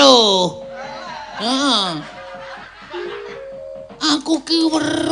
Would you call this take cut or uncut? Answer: cut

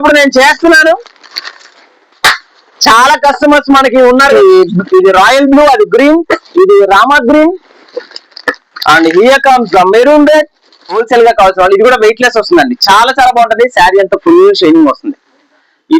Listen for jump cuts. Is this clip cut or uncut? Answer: cut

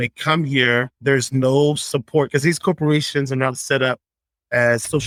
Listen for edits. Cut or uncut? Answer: uncut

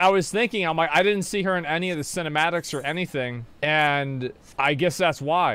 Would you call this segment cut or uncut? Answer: cut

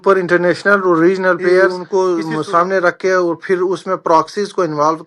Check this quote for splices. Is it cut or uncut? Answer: cut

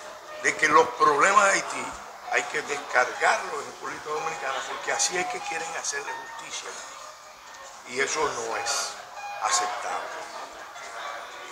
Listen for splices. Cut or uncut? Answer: uncut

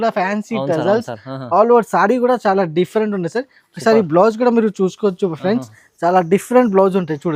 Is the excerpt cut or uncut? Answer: uncut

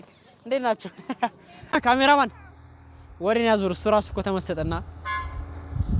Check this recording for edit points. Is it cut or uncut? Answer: cut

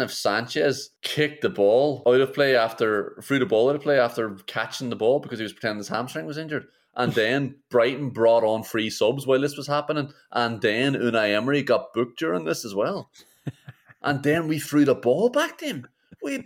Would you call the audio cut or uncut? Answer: cut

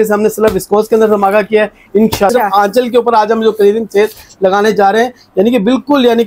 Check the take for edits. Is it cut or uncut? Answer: cut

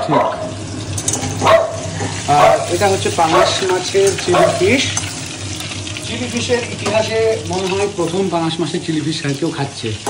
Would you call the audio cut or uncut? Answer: uncut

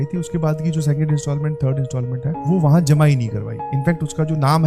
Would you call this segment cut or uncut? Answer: uncut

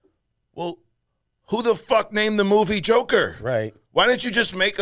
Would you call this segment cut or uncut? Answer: uncut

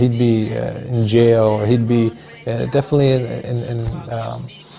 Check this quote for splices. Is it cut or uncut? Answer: uncut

